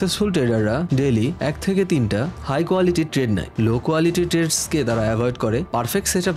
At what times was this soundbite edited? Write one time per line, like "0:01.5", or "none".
none